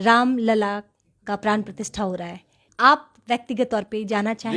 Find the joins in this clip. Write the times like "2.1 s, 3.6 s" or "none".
2.6 s